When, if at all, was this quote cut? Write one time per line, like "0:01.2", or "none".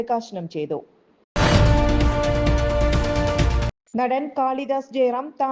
none

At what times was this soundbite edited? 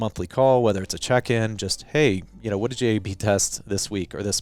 none

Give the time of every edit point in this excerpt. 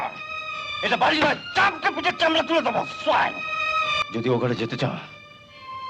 0:04.0

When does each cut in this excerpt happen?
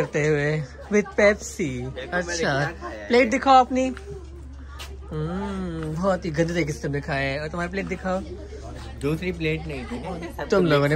none

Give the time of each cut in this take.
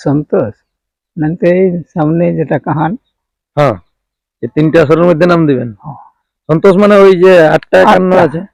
none

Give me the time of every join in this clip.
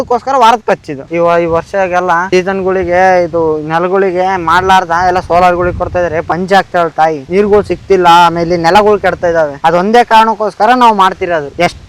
0:00.9

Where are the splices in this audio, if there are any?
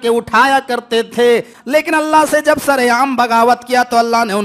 0:01.5

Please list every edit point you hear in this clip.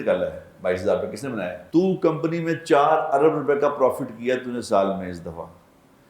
0:01.6

